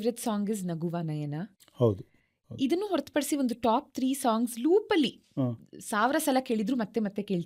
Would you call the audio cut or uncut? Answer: uncut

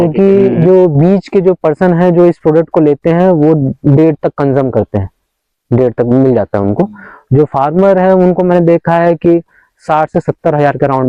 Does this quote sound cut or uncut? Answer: uncut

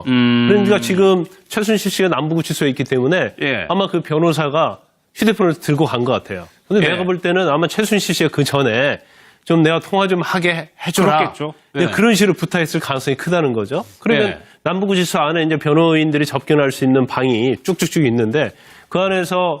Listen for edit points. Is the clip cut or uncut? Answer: cut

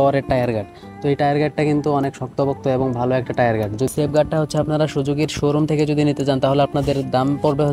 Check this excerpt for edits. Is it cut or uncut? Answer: cut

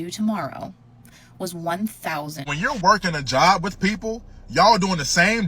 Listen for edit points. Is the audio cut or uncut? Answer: cut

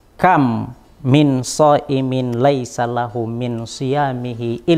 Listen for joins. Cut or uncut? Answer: uncut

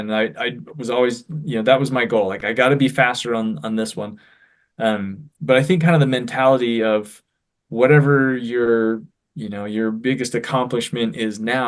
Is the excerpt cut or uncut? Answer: uncut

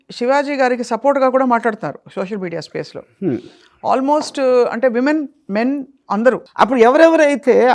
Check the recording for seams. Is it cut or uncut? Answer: cut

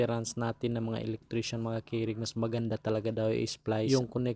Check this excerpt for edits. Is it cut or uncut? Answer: uncut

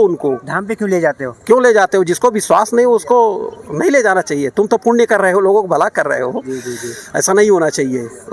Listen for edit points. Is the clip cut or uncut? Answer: uncut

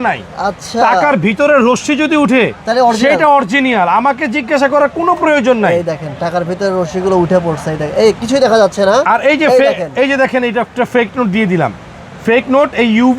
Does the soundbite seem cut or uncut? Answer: uncut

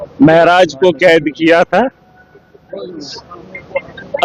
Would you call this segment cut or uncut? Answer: uncut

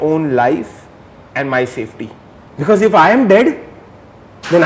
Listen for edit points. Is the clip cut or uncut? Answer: cut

